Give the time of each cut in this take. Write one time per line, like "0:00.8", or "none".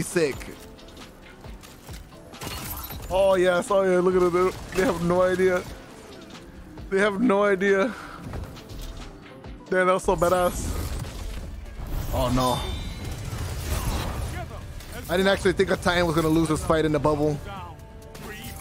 0:11.5